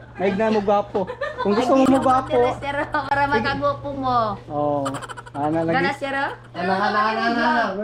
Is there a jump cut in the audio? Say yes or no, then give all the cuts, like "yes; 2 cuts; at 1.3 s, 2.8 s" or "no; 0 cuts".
no; 0 cuts